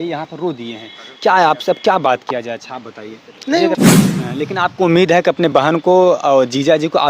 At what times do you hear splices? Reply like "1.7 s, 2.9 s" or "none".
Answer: 3.7 s, 4.3 s